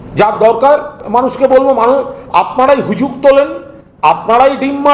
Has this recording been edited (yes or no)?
yes